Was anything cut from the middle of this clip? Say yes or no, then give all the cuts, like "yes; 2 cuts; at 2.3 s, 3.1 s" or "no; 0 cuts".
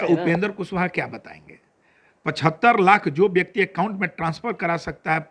no; 0 cuts